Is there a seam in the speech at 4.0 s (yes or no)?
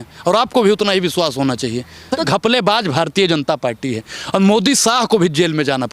no